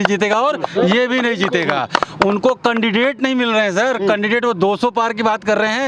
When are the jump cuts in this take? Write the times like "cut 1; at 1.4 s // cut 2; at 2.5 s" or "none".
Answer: none